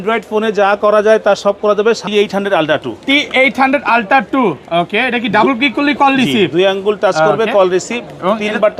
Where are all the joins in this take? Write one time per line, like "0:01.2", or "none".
0:02.0